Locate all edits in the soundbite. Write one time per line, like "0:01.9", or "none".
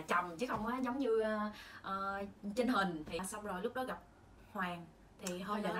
0:03.2